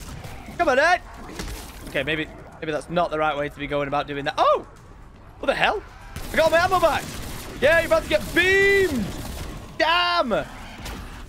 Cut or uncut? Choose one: uncut